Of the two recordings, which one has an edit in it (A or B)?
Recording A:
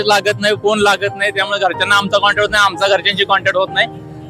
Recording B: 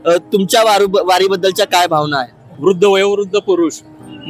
B